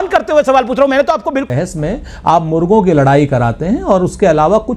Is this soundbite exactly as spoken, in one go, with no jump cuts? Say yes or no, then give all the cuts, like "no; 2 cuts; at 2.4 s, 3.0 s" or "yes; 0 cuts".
no; 1 cut; at 1.5 s